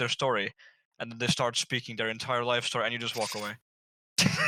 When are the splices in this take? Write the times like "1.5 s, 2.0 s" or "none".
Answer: none